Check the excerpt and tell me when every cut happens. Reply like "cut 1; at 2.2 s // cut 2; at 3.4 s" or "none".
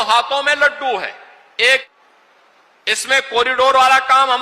cut 1; at 1.9 s